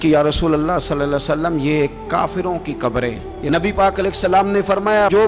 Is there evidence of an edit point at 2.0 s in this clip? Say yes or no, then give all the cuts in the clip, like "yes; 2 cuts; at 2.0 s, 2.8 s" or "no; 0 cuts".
no; 1 cut; at 3.3 s